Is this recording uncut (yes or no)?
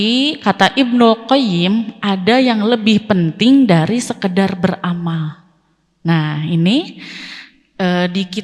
yes